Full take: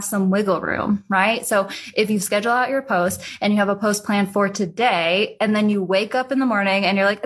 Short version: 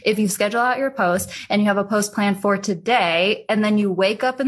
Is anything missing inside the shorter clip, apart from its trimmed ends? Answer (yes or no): no